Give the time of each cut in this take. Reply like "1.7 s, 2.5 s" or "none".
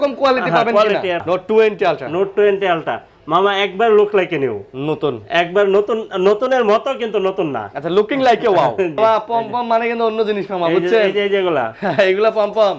1.2 s, 9.0 s